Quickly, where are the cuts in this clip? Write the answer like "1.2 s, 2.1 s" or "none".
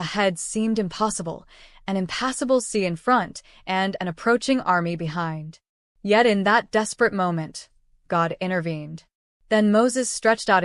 none